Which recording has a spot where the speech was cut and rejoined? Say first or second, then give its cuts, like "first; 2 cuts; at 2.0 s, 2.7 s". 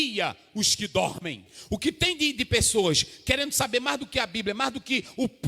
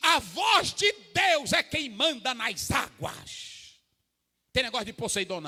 first; 1 cut; at 1.5 s